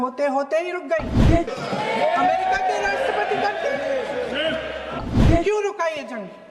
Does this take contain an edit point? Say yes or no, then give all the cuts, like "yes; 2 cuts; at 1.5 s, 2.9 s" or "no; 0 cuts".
yes; 2 cuts; at 1.5 s, 5.0 s